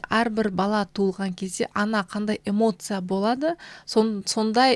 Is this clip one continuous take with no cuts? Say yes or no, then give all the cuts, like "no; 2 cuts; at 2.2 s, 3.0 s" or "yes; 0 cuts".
yes; 0 cuts